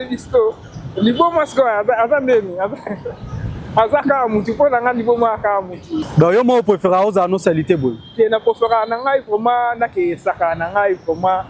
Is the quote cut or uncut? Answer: cut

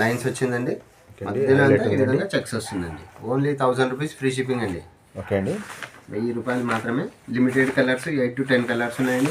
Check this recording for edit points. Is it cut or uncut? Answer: uncut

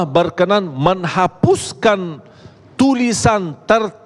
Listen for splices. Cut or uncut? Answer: uncut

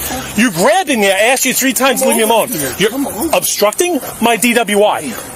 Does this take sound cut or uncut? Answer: uncut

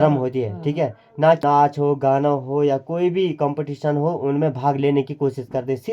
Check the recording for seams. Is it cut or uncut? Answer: cut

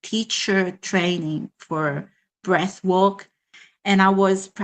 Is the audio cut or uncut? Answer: uncut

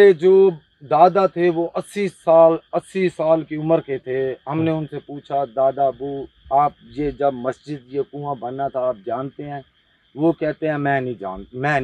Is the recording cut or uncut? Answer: uncut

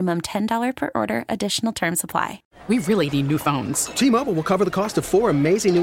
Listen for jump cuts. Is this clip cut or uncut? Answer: cut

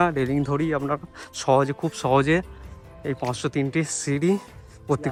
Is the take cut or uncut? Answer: uncut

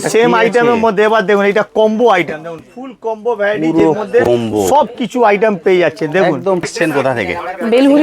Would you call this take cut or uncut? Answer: cut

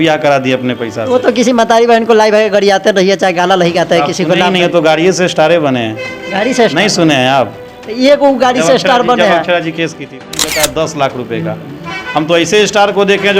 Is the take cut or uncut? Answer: cut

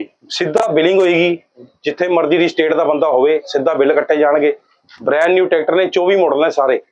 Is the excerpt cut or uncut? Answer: uncut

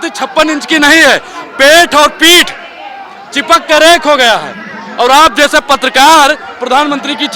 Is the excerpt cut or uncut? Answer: uncut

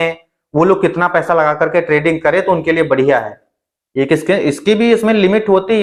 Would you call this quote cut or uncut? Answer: uncut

